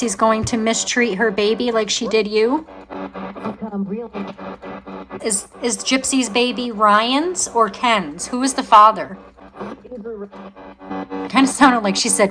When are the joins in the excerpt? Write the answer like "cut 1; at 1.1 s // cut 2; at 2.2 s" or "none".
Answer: cut 1; at 2.9 s // cut 2; at 5.2 s // cut 3; at 9.4 s // cut 4; at 10.9 s